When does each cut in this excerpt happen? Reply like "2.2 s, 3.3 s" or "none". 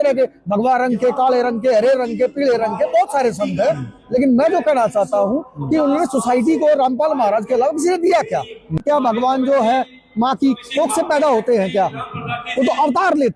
8.8 s